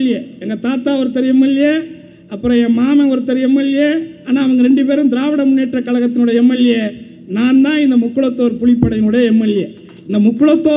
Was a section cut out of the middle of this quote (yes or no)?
no